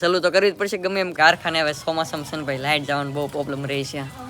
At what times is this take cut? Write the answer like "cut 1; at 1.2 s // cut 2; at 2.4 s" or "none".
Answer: cut 1; at 1.1 s